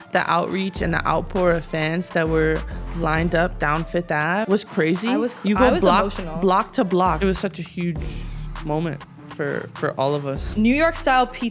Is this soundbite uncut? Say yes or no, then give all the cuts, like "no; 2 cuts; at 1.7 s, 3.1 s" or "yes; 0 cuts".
no; 3 cuts; at 4.5 s, 7.2 s, 10.5 s